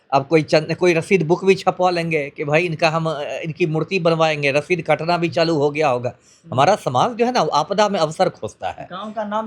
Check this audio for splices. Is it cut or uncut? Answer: uncut